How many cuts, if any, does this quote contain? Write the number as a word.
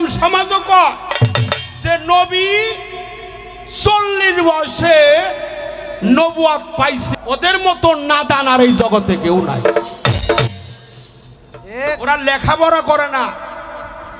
one